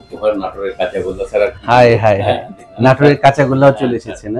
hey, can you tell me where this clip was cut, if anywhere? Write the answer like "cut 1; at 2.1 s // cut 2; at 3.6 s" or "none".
none